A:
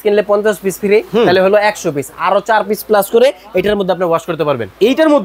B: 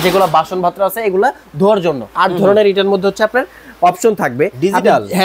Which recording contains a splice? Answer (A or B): B